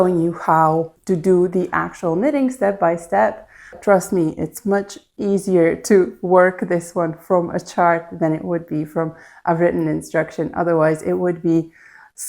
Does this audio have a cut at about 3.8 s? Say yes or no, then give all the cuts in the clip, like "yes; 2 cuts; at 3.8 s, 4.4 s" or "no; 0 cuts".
yes; 2 cuts; at 0.9 s, 3.8 s